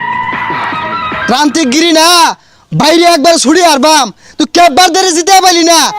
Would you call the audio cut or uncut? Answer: cut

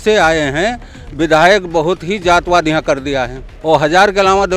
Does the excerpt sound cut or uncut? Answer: cut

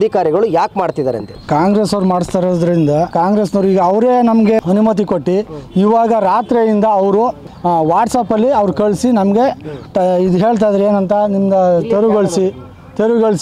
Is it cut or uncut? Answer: cut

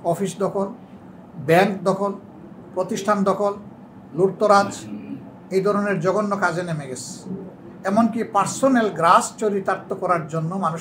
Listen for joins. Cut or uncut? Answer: uncut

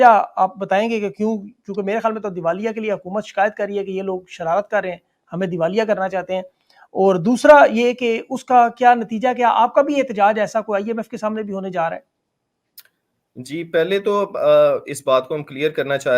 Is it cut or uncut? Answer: uncut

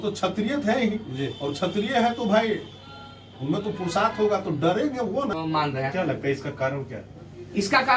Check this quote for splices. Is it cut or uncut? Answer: cut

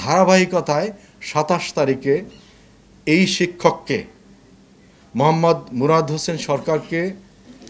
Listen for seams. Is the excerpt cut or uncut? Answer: uncut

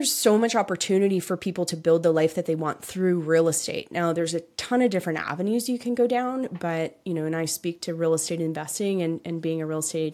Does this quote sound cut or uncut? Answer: uncut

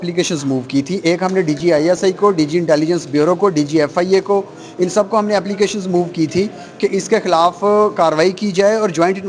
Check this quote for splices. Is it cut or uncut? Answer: uncut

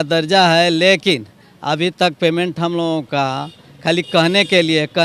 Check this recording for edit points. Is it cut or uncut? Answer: uncut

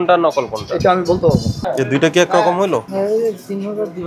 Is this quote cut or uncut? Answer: cut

